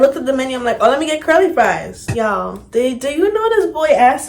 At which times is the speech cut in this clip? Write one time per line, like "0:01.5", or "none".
0:02.0